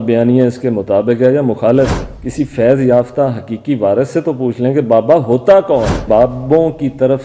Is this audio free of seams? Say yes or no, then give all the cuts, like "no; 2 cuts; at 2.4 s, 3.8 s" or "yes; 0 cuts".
no; 2 cuts; at 2.1 s, 6.0 s